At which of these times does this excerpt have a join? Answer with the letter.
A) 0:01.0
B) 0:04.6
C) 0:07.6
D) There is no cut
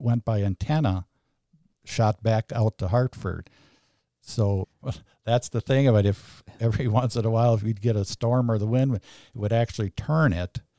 B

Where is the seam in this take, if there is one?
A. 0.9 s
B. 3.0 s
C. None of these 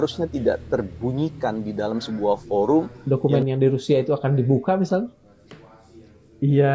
B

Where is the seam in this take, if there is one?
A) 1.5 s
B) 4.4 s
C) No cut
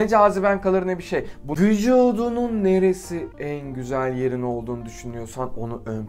A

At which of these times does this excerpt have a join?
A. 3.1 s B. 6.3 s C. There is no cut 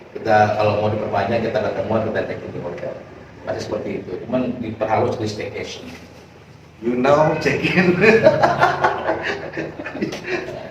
C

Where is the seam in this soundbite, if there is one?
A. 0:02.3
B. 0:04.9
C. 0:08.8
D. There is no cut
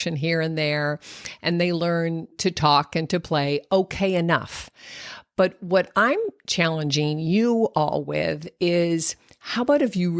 A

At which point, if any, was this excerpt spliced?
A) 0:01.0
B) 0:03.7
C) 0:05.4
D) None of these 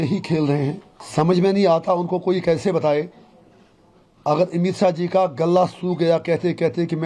A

